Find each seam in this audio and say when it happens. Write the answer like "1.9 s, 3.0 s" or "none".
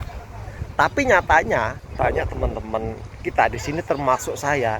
1.8 s